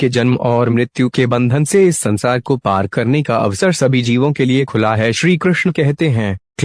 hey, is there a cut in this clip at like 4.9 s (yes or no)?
yes